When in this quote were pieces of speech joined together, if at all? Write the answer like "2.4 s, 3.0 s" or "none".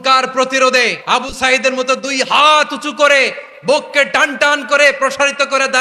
1.0 s